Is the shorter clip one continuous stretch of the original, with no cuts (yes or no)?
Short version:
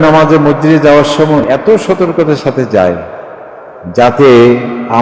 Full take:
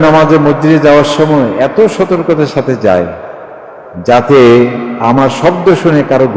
no